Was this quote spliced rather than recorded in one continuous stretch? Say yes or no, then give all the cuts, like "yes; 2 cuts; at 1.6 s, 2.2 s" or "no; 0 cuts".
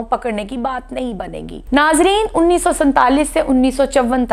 yes; 1 cut; at 1.5 s